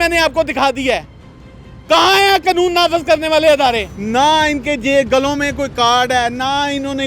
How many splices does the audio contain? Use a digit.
1